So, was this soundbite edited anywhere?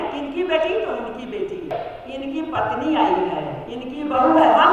yes; 1 cut; at 1.9 s

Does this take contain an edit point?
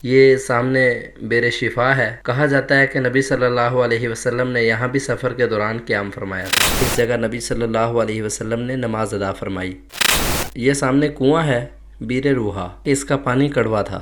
yes; 3 cuts; at 6.7 s, 10.1 s, 12.7 s

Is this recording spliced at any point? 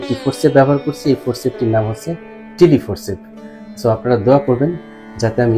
no; 0 cuts

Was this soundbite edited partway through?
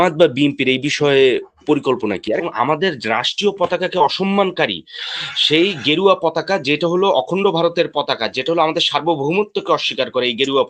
yes; 1 cut; at 2.4 s

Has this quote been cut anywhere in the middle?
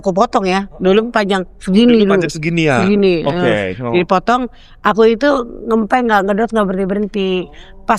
no; 0 cuts

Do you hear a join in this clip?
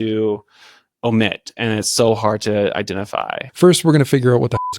yes; 1 cut; at 3.4 s

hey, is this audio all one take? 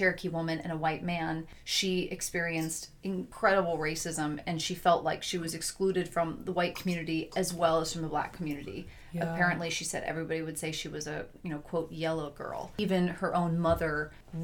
no; 2 cuts; at 3.3 s, 12.8 s

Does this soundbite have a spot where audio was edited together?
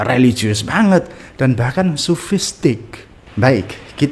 no; 0 cuts

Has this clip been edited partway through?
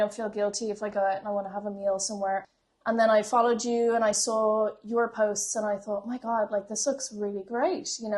yes; 1 cut; at 2.4 s

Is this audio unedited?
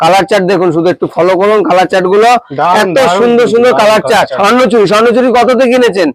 no; 1 cut; at 4.4 s

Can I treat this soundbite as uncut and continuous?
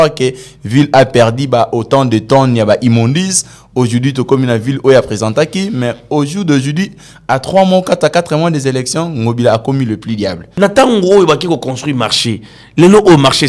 no; 1 cut; at 10.4 s

